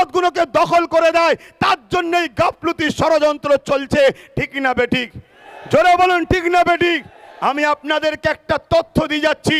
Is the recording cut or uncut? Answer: uncut